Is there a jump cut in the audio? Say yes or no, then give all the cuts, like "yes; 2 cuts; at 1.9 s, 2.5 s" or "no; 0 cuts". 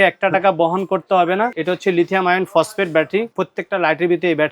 yes; 2 cuts; at 1.6 s, 3.4 s